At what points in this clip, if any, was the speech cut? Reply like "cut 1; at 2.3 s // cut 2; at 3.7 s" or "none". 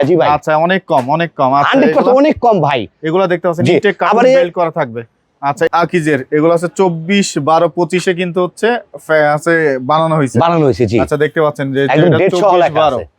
cut 1; at 5.7 s